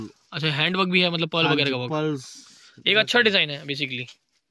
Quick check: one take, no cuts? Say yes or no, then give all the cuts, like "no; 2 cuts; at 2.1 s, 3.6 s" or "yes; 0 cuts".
yes; 0 cuts